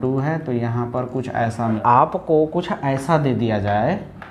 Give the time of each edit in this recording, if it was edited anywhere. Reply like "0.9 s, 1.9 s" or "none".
1.8 s